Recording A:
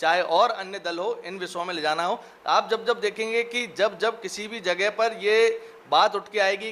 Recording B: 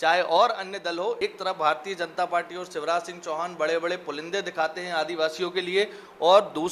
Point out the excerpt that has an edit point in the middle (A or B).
B